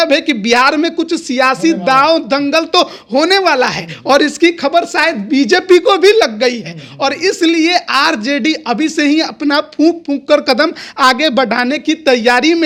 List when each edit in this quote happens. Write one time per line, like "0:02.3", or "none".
none